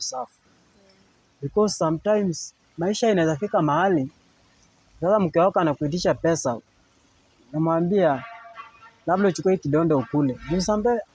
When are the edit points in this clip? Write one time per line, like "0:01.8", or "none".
none